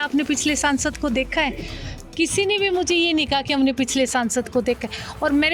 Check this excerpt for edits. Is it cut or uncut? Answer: uncut